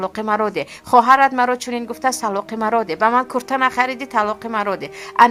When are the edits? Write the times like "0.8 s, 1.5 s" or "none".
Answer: none